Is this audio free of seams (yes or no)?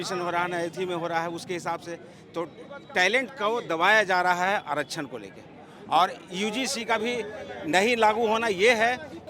yes